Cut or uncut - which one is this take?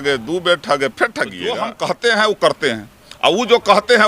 cut